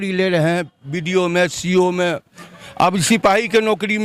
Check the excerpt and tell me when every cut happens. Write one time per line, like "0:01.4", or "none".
none